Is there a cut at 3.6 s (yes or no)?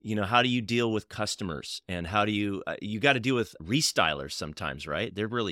yes